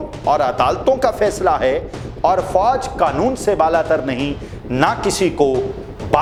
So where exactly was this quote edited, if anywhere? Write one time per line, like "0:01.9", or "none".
none